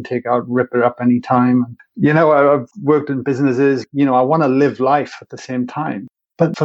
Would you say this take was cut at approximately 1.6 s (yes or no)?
no